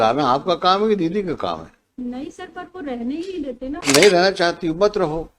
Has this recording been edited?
yes; 1 cut; at 3.8 s

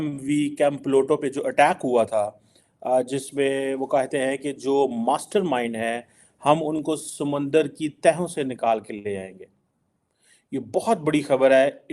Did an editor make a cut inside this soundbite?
no; 0 cuts

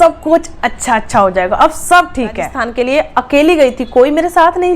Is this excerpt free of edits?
no; 1 cut; at 2.6 s

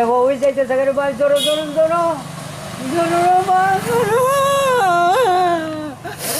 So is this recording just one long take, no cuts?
yes; 0 cuts

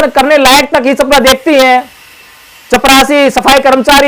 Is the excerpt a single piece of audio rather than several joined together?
yes; 0 cuts

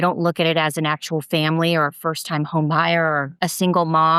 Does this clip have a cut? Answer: yes; 1 cut; at 3.3 s

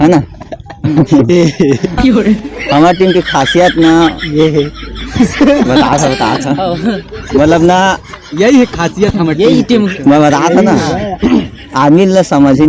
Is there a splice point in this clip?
no; 0 cuts

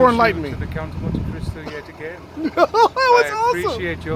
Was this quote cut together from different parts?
no; 0 cuts

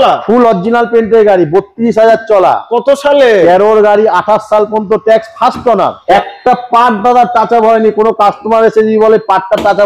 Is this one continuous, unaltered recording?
no; 1 cut; at 6.0 s

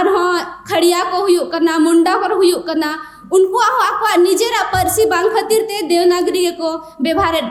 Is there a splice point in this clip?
no; 0 cuts

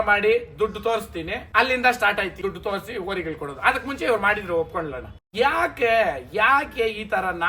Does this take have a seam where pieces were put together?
yes; 3 cuts; at 1.4 s, 2.4 s, 5.3 s

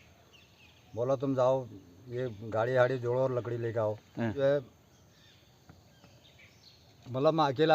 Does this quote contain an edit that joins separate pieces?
yes; 1 cut; at 4.3 s

